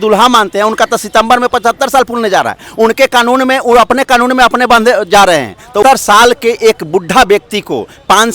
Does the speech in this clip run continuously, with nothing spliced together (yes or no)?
no